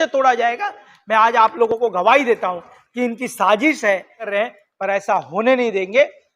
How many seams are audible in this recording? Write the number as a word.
two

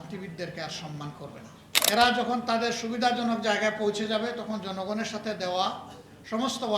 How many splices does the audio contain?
one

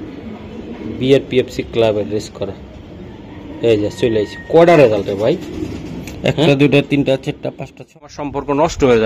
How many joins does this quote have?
one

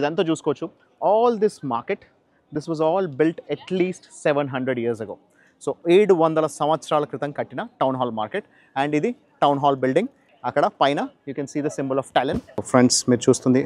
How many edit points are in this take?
two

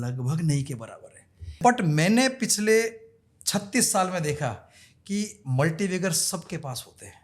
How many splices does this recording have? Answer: one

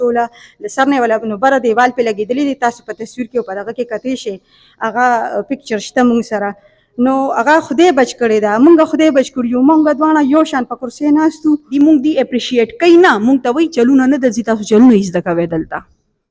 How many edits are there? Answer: one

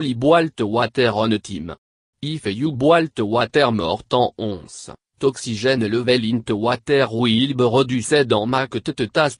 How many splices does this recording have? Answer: zero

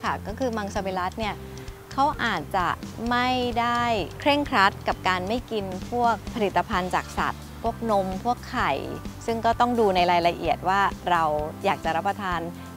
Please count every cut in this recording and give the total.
three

